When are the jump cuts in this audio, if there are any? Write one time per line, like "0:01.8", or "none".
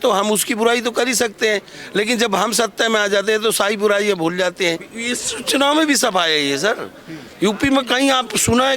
0:04.9

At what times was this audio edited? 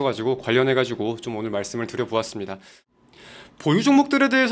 0:02.8

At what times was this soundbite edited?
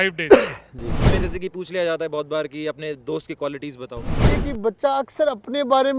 0:01.0
0:04.3

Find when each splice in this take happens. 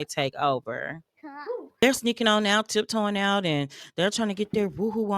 0:01.6

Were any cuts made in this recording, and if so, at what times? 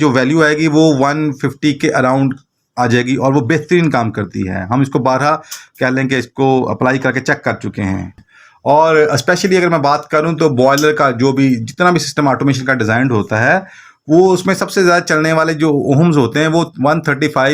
0:08.2

